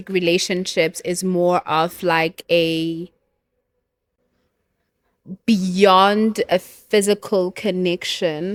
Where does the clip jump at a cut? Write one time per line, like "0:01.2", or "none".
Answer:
none

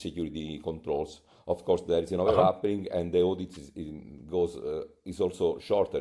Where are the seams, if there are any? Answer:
none

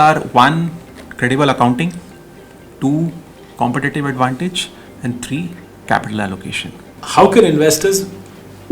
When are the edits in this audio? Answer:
0:06.9

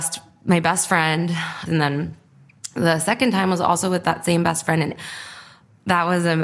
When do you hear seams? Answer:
0:01.6
0:05.0

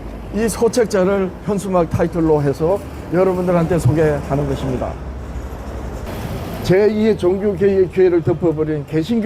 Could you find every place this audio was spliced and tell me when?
0:06.1

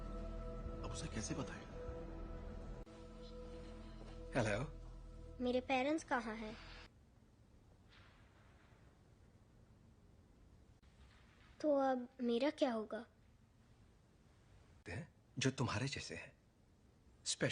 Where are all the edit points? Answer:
0:06.9

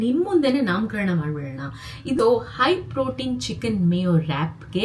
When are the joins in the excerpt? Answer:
0:02.2

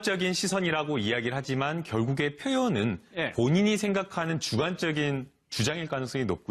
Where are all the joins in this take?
none

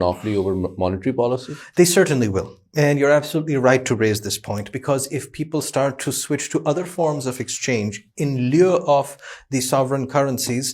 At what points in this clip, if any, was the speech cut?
none

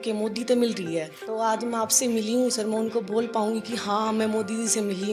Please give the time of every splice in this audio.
0:01.2

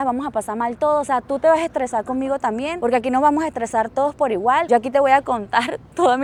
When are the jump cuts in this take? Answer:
none

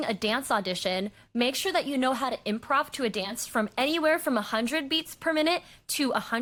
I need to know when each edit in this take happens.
none

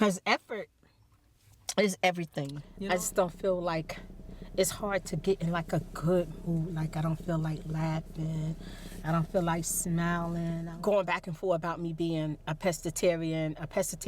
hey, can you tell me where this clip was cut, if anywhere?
0:02.6
0:10.7

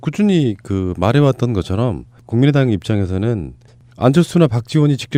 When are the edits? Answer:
none

